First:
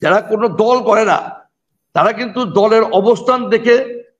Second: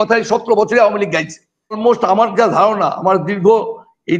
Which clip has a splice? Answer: second; 1 cut; at 1.8 s

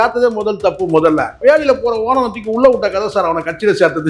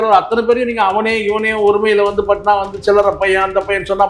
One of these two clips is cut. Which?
first; 1 cut; at 1.4 s

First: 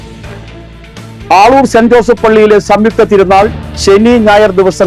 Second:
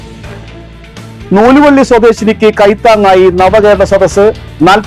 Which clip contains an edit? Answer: first; 1 cut; at 1.0 s

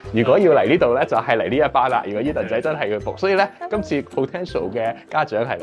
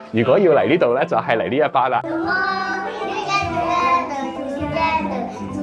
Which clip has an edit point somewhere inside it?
second; 1 cut; at 2.0 s

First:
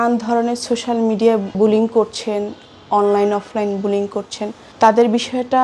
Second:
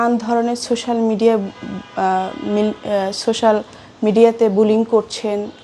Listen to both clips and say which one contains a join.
first; 2 cuts; at 1.6 s, 4.6 s

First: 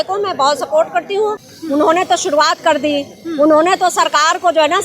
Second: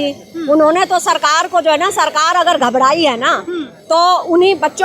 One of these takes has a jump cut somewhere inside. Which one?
first; 1 cut; at 1.4 s

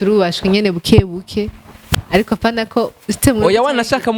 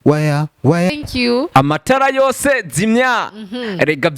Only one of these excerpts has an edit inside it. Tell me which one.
second; 1 cut; at 0.9 s

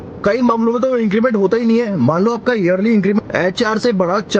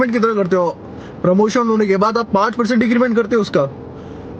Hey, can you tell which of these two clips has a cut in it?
first; 1 cut; at 3.2 s

